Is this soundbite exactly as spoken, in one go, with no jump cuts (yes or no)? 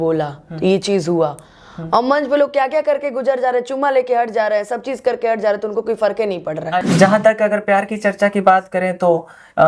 no